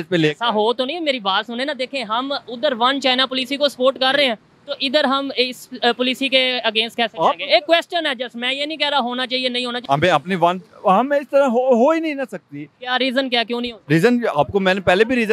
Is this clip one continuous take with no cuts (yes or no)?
no